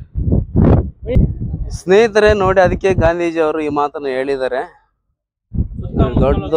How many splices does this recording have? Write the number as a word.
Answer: one